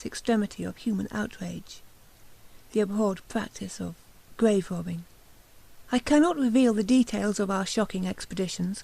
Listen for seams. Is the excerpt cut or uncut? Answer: cut